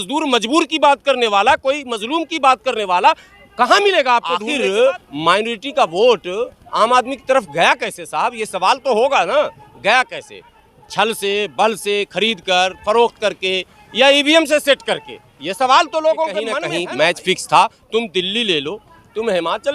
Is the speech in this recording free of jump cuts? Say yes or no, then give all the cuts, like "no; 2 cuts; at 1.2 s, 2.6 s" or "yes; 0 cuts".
no; 2 cuts; at 4.5 s, 16.6 s